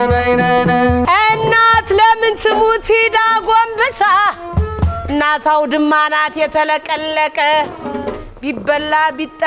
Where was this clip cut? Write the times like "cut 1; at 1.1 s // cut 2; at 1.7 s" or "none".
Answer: cut 1; at 1.0 s